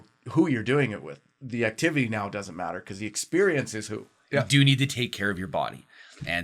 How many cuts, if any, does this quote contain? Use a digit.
1